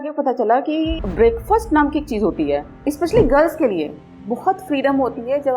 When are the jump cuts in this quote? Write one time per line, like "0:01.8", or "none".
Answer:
0:01.0
0:02.7